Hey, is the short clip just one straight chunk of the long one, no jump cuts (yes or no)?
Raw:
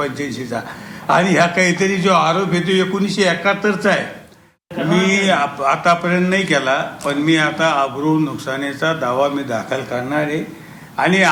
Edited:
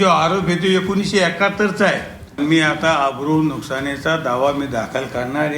no